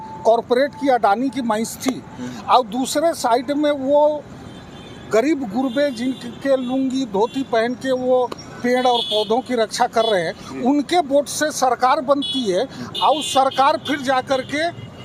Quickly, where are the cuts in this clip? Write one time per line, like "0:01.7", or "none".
none